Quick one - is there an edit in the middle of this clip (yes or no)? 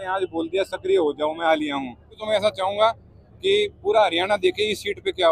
yes